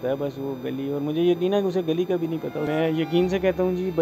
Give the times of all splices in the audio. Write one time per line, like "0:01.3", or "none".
0:02.6